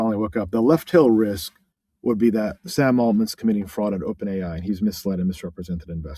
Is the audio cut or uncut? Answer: uncut